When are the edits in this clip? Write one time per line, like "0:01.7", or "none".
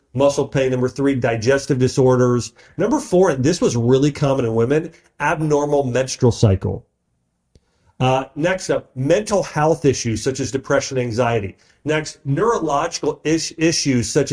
none